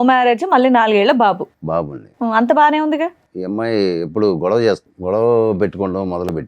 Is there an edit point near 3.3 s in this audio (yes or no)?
yes